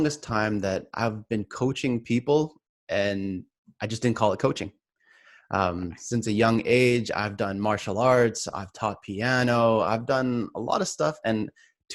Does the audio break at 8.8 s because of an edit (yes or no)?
no